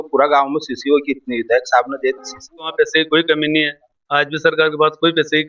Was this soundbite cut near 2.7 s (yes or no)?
yes